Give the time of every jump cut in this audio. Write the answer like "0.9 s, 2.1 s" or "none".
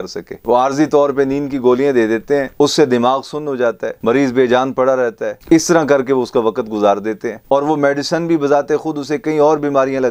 none